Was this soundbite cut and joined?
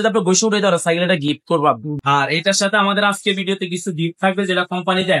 yes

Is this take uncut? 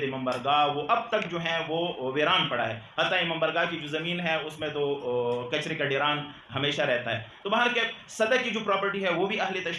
yes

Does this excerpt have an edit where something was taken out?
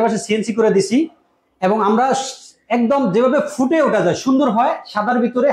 no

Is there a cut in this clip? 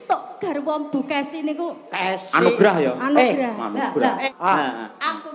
yes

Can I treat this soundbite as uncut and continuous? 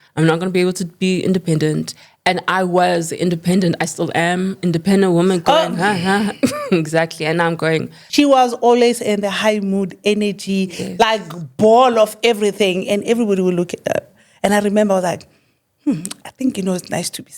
no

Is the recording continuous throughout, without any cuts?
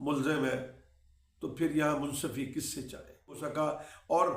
no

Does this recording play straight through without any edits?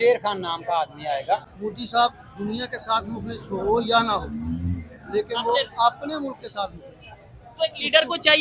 no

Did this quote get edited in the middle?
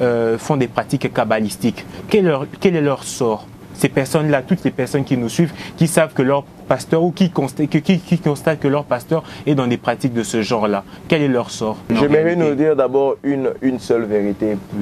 yes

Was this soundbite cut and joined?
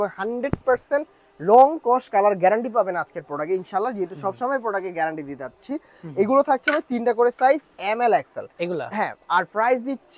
no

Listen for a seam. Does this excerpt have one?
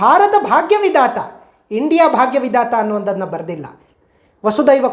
yes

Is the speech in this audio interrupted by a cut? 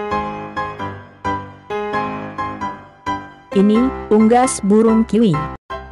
no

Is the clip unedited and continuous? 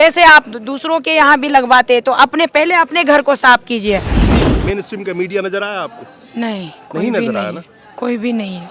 no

